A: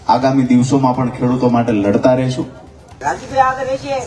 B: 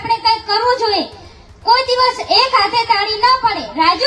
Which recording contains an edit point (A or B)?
A